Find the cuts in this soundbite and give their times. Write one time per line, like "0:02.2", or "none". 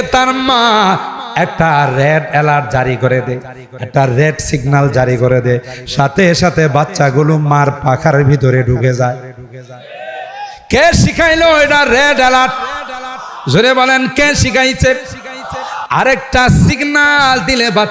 0:15.7